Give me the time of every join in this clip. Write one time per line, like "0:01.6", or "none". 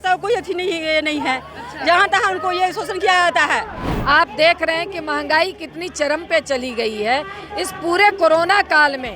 0:03.9